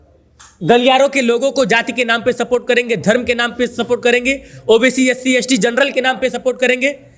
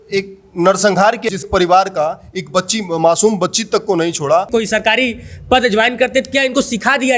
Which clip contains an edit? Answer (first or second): second